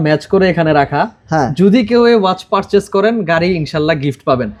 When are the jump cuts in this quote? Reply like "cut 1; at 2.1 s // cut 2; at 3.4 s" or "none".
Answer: none